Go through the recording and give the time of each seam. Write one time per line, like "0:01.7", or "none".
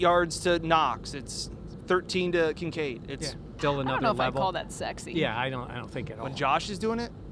0:03.5